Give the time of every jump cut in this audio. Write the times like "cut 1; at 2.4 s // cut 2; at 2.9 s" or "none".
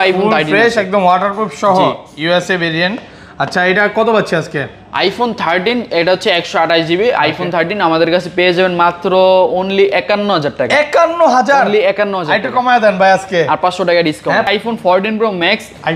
cut 1; at 14.5 s